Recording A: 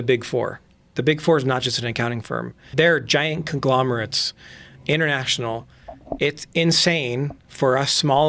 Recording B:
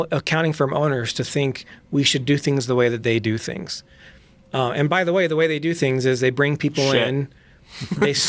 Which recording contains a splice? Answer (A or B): A